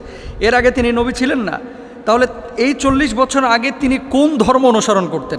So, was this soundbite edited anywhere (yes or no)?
no